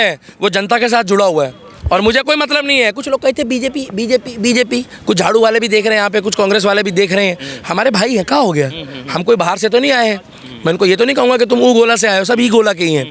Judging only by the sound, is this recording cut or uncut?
uncut